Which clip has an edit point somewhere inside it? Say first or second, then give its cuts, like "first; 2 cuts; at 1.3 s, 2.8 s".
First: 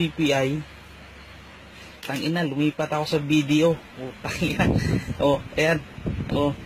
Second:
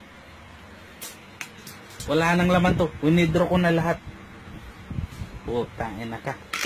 first; 1 cut; at 1.9 s